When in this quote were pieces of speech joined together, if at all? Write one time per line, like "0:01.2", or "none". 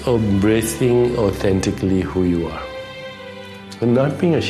none